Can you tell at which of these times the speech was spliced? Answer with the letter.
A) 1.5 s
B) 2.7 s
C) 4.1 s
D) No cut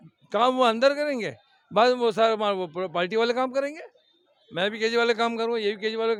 D